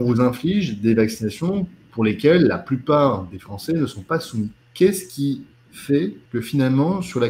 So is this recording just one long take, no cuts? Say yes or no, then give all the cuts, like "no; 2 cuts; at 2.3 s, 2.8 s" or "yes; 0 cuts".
no; 2 cuts; at 4.6 s, 6.2 s